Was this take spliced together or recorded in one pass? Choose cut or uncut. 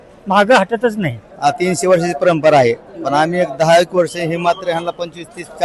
cut